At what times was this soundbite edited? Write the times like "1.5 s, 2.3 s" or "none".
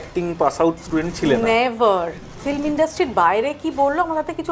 2.4 s